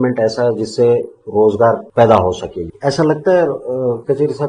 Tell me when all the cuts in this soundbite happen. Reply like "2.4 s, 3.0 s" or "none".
1.8 s, 2.6 s

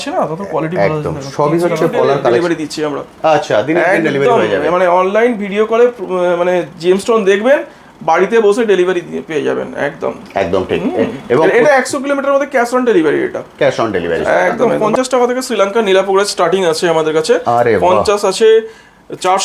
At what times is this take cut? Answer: 2.4 s, 14.7 s

